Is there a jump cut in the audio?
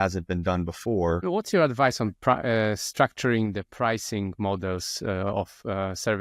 yes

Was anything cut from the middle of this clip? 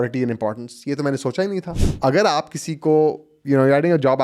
yes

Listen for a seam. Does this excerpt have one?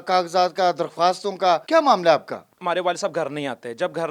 yes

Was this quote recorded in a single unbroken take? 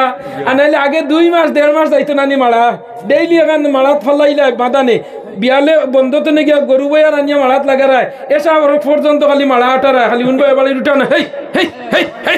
yes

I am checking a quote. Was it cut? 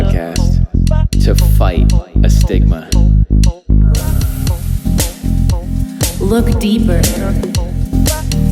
yes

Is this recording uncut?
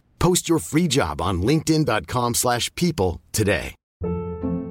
no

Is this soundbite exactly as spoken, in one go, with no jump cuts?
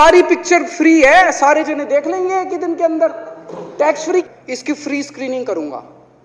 no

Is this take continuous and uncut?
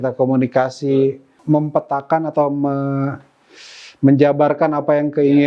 no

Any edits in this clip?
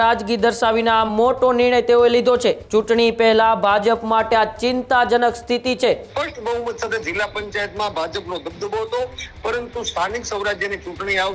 yes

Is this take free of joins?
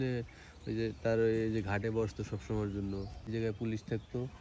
no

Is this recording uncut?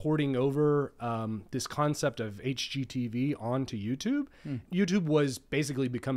no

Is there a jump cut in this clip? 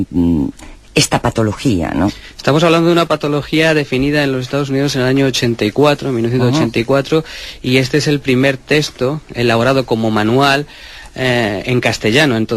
yes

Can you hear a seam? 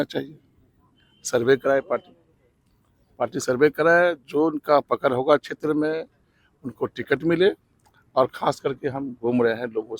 no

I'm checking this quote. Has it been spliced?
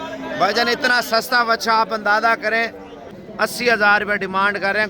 yes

